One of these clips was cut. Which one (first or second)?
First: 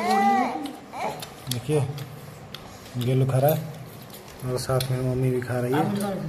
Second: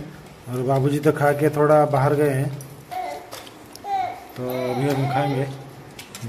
second